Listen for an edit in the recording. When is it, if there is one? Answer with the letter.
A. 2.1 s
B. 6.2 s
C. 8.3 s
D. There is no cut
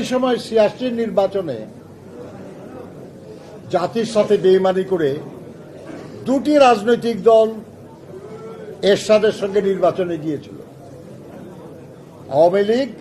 D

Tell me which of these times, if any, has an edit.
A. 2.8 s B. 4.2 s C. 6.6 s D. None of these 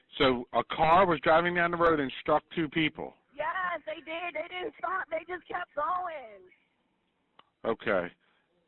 B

